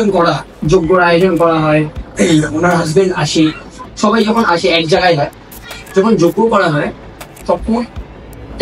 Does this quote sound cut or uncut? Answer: uncut